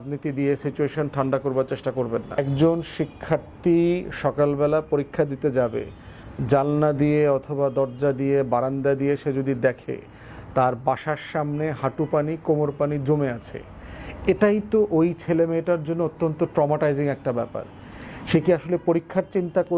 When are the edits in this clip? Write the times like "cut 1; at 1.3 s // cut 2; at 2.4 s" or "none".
cut 1; at 2.4 s